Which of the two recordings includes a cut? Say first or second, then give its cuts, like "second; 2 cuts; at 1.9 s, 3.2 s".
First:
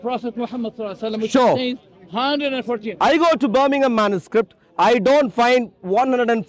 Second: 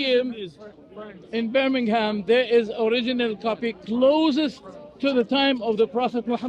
first; 1 cut; at 2.9 s